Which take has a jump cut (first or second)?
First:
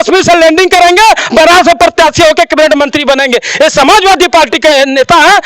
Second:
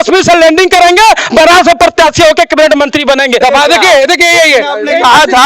second